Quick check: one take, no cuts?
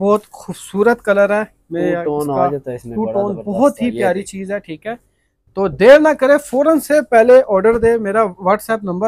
yes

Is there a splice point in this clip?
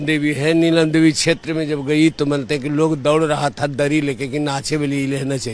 no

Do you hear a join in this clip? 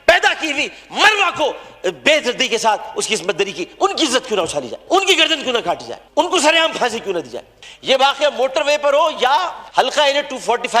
yes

